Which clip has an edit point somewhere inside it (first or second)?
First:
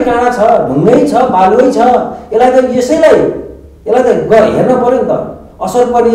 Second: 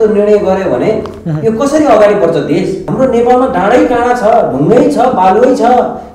second